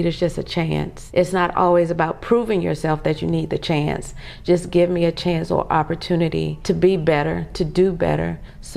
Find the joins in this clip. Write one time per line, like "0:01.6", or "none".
0:01.0
0:06.5

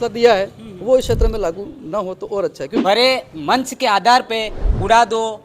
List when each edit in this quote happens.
0:02.7

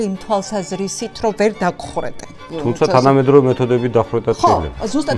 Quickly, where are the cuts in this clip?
0:02.4

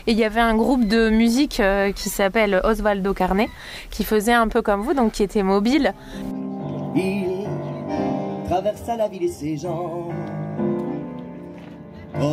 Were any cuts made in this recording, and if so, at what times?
0:06.2

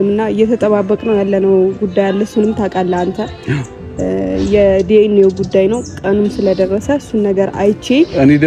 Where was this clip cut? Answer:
none

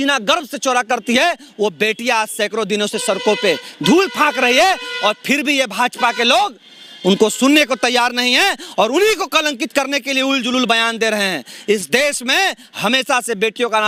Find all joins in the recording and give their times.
none

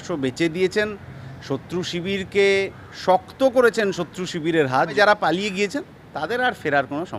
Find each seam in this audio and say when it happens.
0:04.9

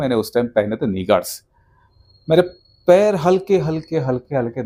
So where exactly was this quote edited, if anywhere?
none

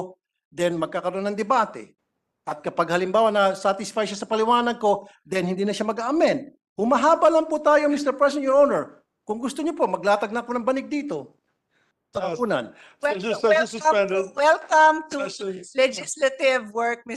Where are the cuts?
none

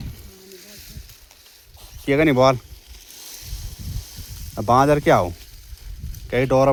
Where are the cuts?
none

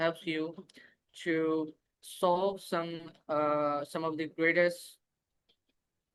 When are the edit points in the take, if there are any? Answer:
none

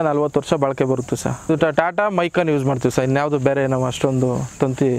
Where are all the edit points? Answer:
0:01.5

